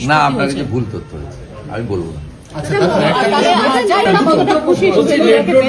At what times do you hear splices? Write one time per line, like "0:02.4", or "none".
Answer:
0:04.1